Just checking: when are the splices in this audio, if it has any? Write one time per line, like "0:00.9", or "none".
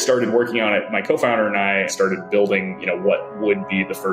0:01.9